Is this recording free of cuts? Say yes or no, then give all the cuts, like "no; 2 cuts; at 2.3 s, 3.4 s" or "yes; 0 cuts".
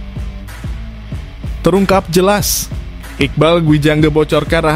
yes; 0 cuts